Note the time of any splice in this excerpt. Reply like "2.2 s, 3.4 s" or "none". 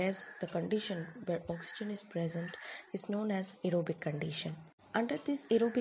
4.7 s